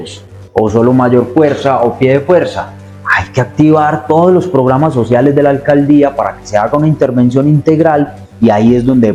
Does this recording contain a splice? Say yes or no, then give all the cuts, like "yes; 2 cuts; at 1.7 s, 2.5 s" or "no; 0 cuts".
no; 0 cuts